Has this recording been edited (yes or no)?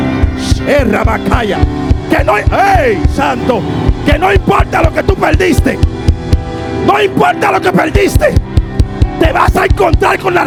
no